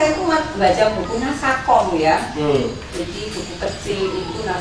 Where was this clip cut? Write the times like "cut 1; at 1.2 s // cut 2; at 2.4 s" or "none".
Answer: none